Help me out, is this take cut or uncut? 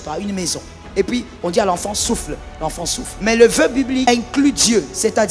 cut